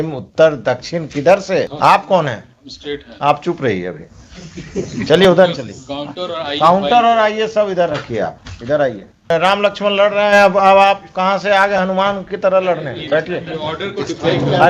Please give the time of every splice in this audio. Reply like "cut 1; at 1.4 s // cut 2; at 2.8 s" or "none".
cut 1; at 1.7 s // cut 2; at 9.3 s